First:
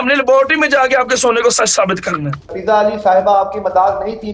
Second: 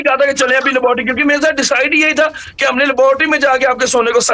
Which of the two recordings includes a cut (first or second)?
first